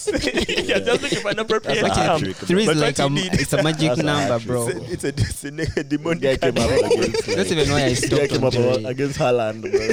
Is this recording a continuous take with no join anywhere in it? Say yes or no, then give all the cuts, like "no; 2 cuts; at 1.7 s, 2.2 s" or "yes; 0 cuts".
yes; 0 cuts